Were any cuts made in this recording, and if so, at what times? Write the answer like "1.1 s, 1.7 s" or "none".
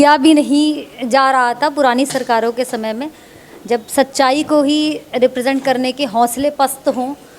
none